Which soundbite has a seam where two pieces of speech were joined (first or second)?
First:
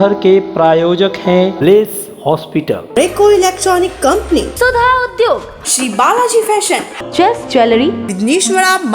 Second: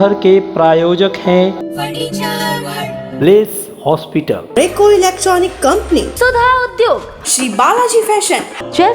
second